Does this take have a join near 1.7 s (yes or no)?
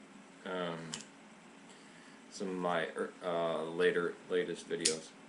no